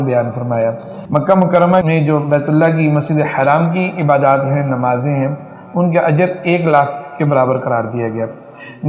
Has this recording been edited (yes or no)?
yes